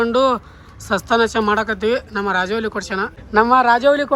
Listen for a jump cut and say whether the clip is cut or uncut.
uncut